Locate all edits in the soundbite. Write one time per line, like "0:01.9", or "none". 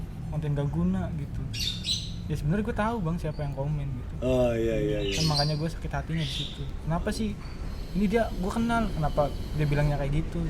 none